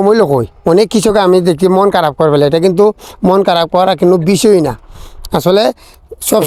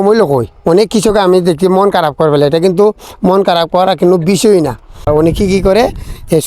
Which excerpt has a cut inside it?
second; 1 cut; at 5.0 s

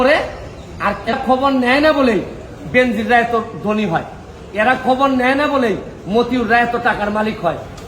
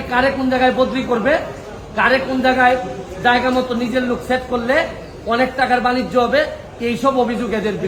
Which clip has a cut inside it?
first; 1 cut; at 1.1 s

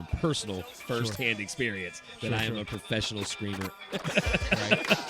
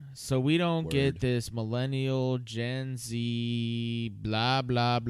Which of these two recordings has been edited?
first; 1 cut; at 3.8 s

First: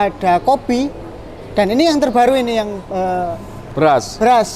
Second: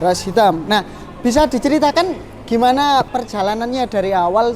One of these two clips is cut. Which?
second; 1 cut; at 3.1 s

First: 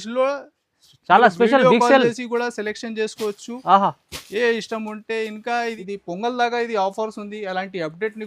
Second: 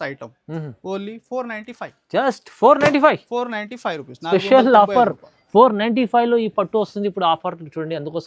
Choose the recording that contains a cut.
first; 1 cut; at 5.8 s

